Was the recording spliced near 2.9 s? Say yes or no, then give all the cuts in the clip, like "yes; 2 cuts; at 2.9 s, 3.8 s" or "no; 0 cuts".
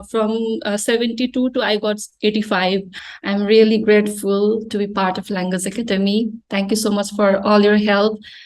yes; 1 cut; at 2.9 s